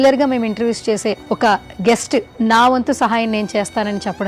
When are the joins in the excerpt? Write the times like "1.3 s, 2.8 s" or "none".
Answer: 1.2 s

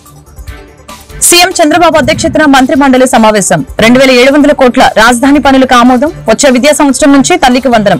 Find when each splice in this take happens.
1.3 s

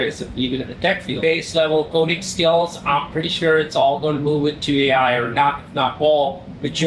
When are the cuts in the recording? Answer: 1.1 s

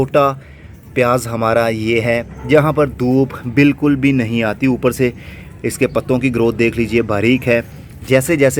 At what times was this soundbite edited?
none

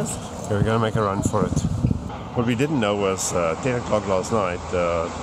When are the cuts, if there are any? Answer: 2.1 s

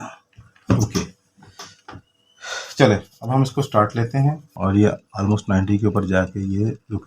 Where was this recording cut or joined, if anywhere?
4.5 s

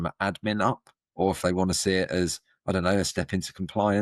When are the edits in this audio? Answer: none

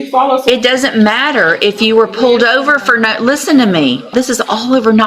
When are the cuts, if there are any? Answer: 4.1 s

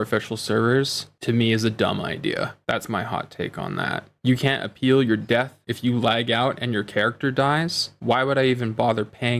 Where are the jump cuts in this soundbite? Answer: none

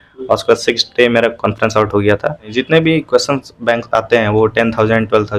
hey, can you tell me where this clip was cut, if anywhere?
2.5 s

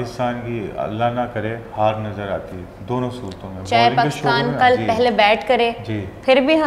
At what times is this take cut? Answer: none

